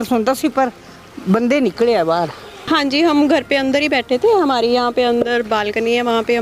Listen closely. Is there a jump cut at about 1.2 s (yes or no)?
no